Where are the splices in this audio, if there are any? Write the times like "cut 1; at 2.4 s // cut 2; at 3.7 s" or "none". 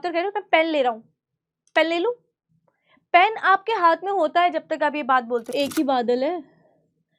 cut 1; at 5.5 s